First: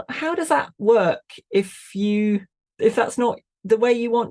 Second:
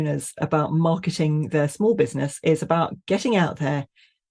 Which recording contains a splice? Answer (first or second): first